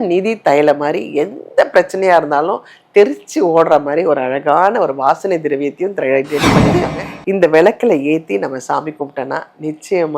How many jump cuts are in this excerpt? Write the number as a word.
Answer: one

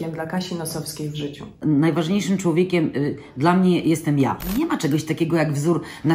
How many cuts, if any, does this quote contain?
two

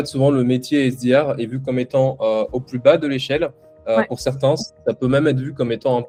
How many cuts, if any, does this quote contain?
zero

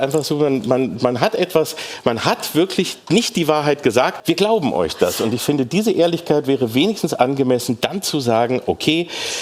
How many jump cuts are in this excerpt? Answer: one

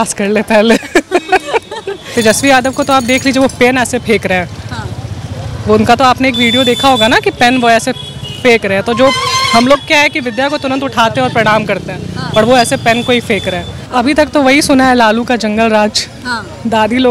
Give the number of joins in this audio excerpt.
two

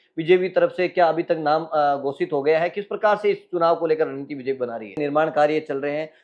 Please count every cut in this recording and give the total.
one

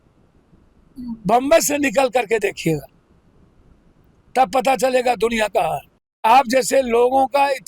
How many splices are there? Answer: one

